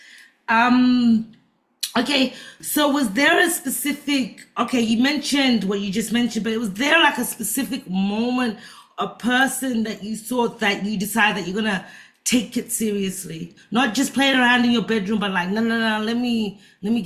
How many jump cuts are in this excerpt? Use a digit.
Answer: 0